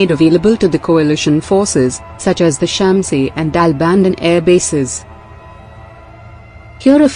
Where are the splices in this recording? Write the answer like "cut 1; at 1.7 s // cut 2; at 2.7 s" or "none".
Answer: none